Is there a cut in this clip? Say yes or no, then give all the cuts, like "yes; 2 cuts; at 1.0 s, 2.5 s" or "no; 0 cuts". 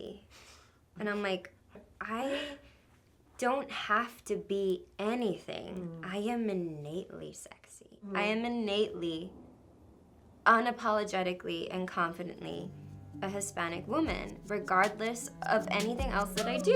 yes; 2 cuts; at 1.8 s, 8.0 s